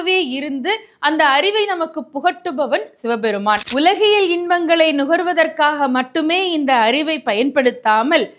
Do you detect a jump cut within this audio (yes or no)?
yes